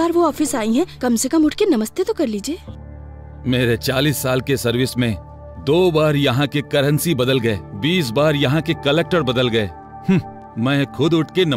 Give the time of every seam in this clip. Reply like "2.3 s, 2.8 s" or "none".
none